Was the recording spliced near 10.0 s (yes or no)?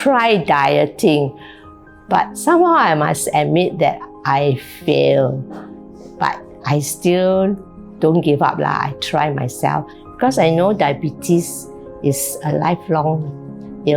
yes